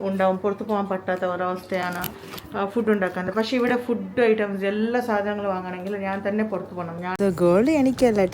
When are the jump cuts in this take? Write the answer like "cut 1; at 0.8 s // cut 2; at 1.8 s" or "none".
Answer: cut 1; at 7.2 s